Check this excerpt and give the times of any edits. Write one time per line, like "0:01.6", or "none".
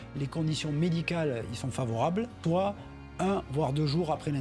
0:02.4